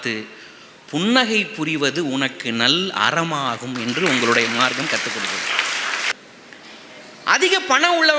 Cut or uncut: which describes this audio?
cut